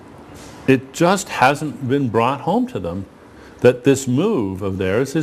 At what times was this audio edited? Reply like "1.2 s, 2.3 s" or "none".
none